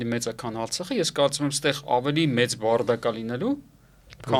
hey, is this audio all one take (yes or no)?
yes